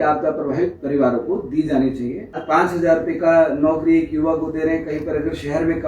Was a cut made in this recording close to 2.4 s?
yes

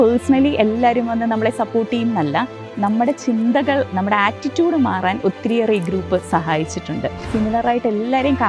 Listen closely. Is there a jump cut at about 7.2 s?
yes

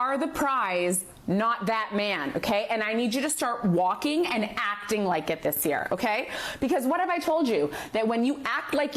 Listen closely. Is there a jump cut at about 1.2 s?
no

